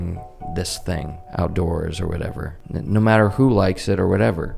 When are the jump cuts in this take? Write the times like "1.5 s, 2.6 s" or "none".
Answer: 1.2 s, 2.5 s